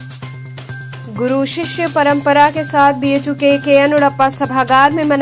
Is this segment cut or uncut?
cut